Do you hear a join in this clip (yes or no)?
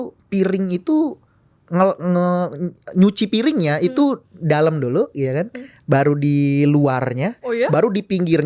no